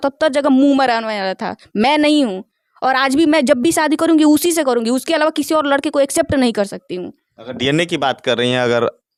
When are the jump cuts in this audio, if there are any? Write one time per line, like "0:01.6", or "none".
none